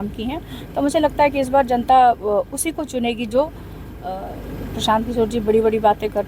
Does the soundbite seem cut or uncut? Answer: cut